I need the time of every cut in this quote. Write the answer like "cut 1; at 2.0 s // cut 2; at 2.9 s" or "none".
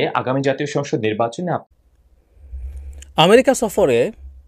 cut 1; at 1.6 s